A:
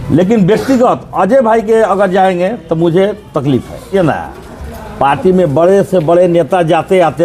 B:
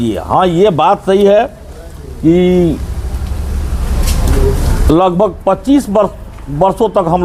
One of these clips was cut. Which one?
A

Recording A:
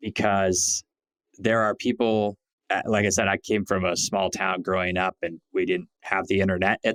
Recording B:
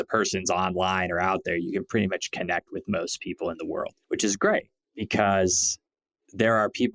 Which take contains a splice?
B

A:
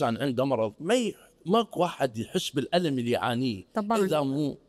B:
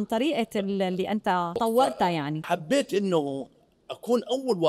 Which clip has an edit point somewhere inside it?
B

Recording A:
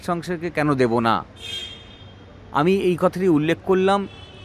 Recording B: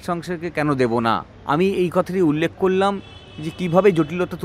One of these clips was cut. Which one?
B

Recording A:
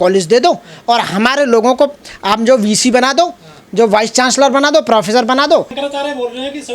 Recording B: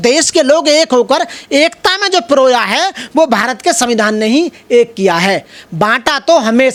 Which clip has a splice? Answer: A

